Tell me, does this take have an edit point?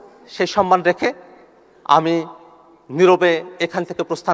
no; 0 cuts

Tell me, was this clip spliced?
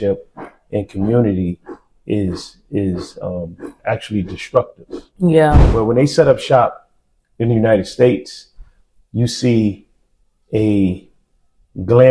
yes; 1 cut; at 5.7 s

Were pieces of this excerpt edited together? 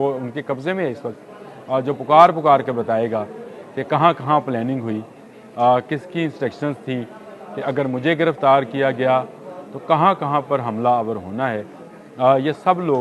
no; 0 cuts

